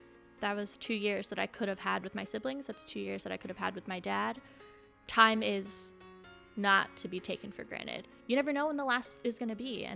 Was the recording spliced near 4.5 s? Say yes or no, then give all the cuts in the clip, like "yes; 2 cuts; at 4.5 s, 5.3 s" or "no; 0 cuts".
no; 1 cut; at 8.1 s